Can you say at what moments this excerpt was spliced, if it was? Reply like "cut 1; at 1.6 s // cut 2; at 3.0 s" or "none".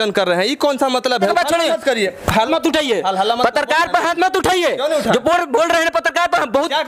cut 1; at 1.3 s // cut 2; at 2.5 s

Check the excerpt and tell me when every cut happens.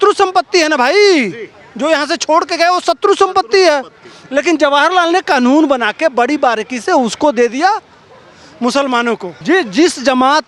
cut 1; at 9.3 s

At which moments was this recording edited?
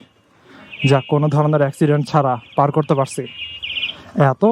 none

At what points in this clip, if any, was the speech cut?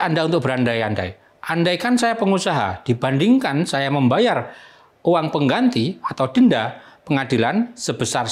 none

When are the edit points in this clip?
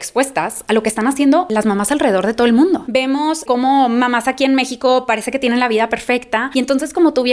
cut 1; at 1.5 s // cut 2; at 2.8 s

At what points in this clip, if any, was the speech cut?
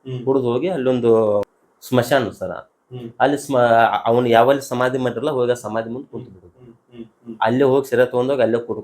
cut 1; at 1.5 s

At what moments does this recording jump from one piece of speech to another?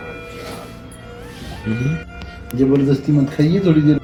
none

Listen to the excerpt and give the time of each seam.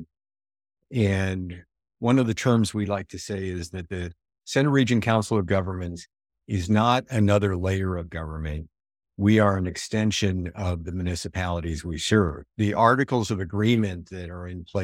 cut 1; at 1.8 s

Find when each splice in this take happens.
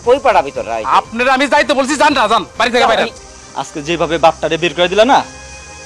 cut 1; at 3.2 s

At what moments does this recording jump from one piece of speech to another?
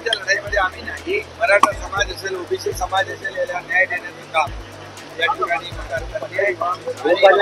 cut 1; at 1.3 s // cut 2; at 5.8 s

